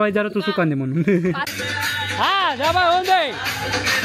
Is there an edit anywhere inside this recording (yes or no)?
yes